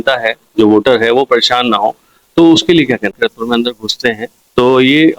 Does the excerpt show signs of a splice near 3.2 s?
yes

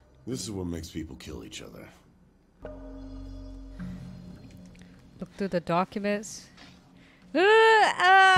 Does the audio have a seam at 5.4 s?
no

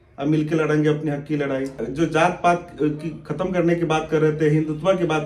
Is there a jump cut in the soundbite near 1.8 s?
yes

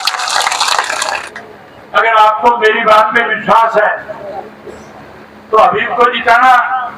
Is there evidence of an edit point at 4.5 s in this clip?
no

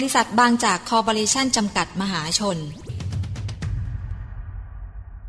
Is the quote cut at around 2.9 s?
yes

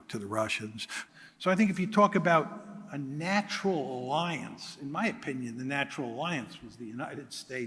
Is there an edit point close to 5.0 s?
no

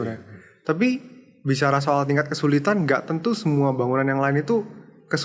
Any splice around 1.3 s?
no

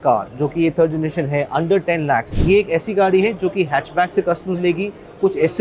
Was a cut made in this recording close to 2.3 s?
yes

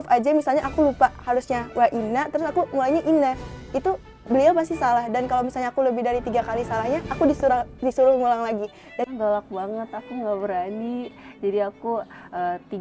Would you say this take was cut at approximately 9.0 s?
yes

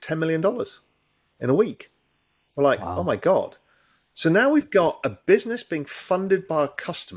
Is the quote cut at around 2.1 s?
no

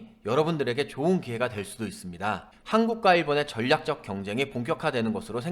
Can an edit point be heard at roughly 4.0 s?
no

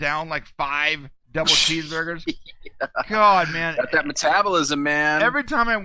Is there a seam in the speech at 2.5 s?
no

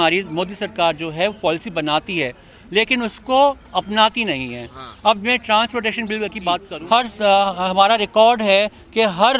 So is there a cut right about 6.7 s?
yes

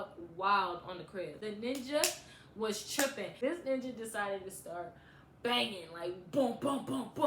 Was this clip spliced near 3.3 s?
yes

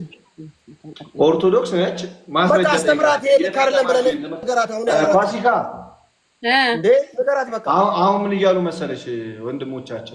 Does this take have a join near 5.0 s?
no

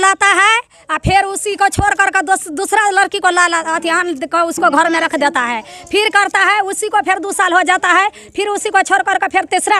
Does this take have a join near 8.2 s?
no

